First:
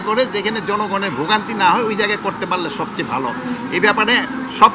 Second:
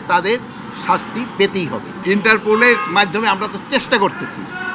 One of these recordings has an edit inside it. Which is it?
second; 1 cut; at 1.9 s

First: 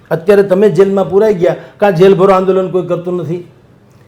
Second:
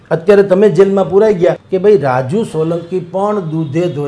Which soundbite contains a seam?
second; 1 cut; at 1.7 s

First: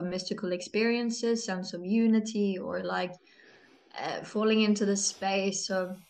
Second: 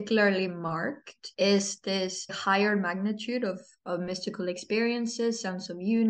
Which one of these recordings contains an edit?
second; 2 cuts; at 1.2 s, 2.4 s

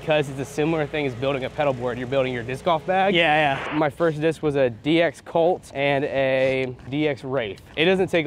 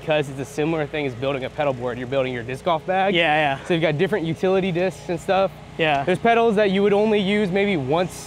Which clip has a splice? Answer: first; 3 cuts; at 3.7 s, 5.7 s, 7.0 s

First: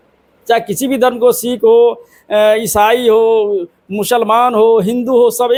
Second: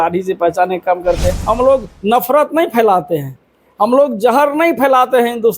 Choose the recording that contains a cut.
second; 1 cut; at 1.3 s

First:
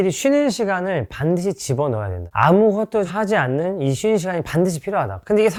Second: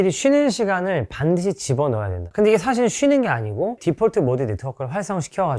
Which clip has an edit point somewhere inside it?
second; 1 cut; at 2.2 s

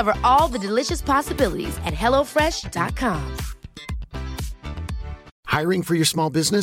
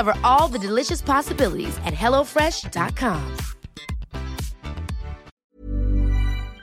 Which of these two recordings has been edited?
second; 1 cut; at 5.4 s

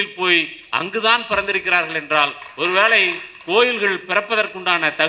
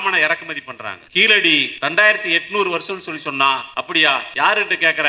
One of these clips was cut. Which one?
second; 3 cuts; at 0.9 s, 1.7 s, 4.0 s

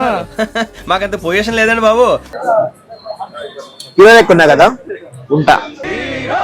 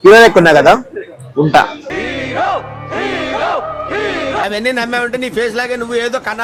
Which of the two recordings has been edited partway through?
first; 1 cut; at 2.3 s

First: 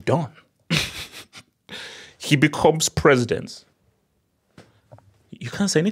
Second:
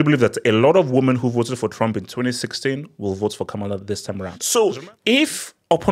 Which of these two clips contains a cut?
second; 1 cut; at 4.3 s

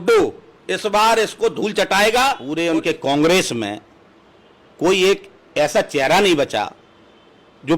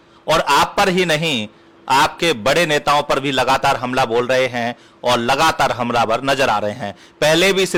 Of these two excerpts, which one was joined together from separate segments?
first; 1 cut; at 2.5 s

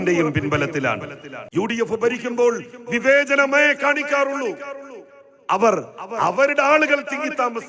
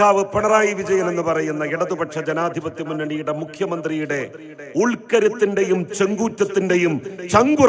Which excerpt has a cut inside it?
first; 1 cut; at 1.4 s

